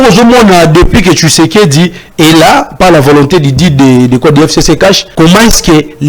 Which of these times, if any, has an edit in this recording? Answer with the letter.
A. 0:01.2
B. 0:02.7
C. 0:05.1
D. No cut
C